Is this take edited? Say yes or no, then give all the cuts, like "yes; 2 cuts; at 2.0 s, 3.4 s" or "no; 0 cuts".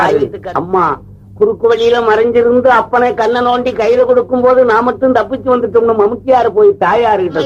no; 0 cuts